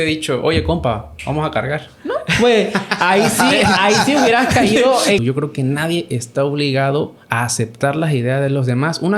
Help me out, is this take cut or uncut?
cut